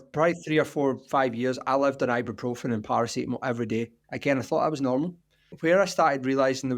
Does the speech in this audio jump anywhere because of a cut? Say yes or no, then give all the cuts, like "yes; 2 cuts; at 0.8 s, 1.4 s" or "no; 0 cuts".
yes; 1 cut; at 5.6 s